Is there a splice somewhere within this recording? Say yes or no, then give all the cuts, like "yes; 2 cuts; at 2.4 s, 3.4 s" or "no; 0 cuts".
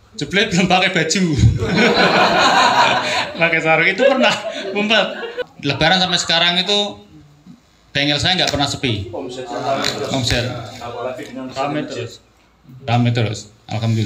yes; 1 cut; at 5.4 s